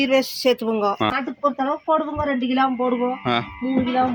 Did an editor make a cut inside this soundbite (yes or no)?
no